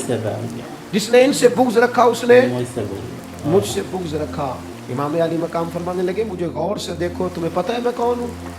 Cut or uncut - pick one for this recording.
cut